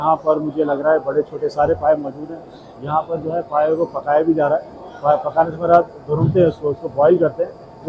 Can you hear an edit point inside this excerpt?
no; 0 cuts

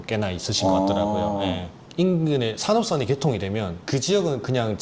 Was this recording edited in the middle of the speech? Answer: yes; 1 cut; at 1.8 s

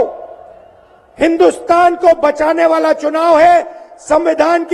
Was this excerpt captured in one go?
yes; 0 cuts

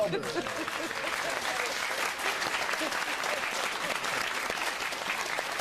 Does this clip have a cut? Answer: yes; 1 cut; at 3.8 s

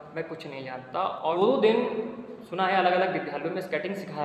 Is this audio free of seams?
no; 1 cut; at 1.3 s

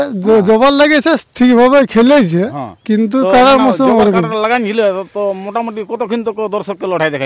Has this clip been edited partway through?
no; 0 cuts

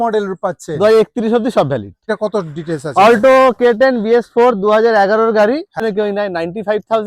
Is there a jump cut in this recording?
yes; 2 cuts; at 2.1 s, 5.8 s

